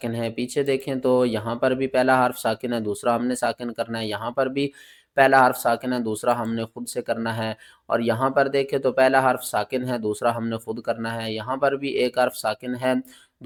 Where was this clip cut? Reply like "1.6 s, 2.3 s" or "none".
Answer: none